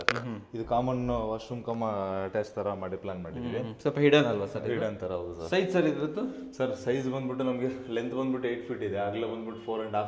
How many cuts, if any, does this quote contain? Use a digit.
0